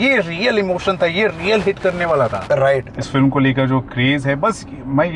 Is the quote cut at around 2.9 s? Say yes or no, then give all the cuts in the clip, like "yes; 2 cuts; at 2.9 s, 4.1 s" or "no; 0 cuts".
yes; 1 cut; at 2.9 s